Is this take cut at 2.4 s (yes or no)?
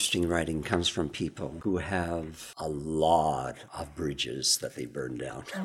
yes